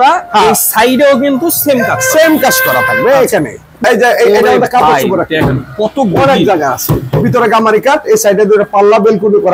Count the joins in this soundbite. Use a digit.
1